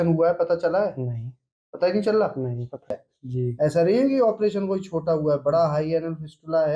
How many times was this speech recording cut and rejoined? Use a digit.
1